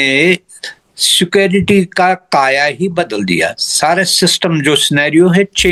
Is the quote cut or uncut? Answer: uncut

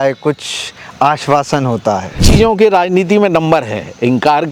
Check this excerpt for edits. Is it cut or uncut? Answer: cut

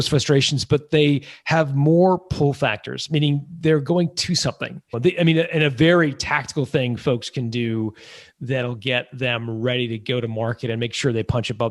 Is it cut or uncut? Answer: cut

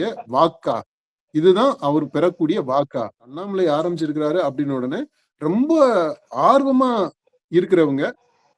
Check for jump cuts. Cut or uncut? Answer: cut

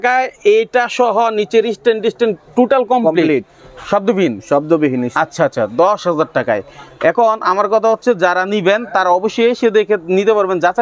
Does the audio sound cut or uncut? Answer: uncut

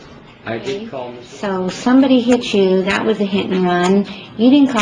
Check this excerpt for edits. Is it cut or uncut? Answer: cut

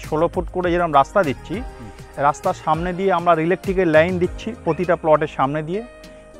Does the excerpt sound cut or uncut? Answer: uncut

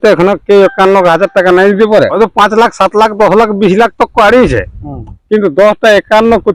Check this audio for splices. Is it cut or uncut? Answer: cut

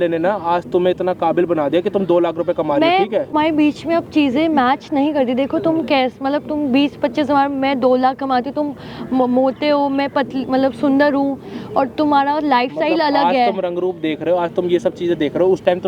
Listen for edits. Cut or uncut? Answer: uncut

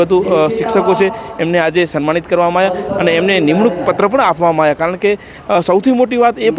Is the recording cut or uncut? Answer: uncut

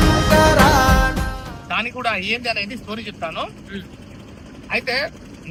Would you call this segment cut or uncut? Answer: uncut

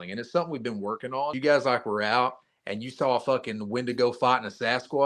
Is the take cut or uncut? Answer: cut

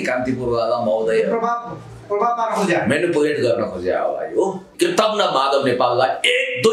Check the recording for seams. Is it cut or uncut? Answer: cut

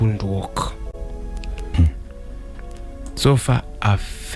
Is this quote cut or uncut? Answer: cut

